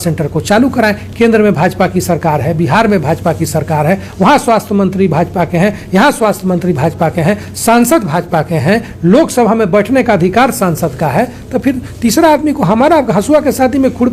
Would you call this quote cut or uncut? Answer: uncut